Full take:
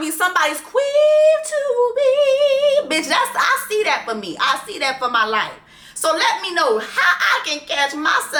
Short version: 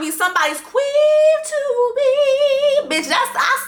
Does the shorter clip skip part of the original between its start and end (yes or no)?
no